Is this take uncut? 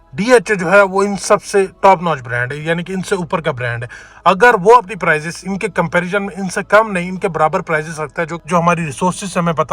no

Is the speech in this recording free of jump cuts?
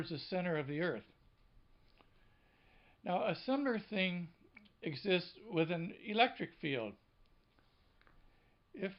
no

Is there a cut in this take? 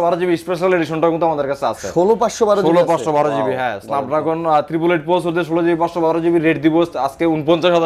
no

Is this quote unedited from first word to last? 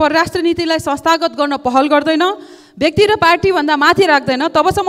yes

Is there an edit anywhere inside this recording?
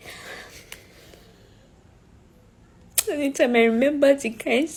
no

